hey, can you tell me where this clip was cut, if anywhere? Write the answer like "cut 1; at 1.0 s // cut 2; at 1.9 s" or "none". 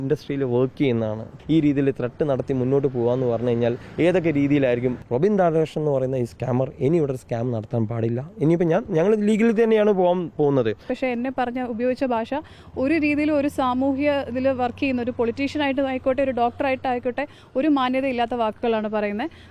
cut 1; at 1.3 s // cut 2; at 5.0 s // cut 3; at 10.9 s